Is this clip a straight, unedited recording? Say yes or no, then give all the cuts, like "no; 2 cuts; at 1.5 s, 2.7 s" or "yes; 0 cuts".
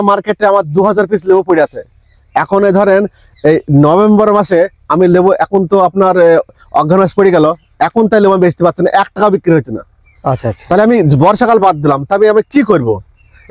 yes; 0 cuts